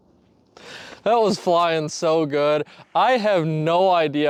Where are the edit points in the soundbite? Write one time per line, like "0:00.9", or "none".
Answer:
none